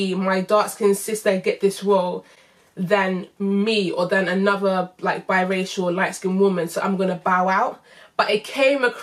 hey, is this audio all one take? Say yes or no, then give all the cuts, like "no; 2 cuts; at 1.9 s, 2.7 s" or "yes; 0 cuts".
yes; 0 cuts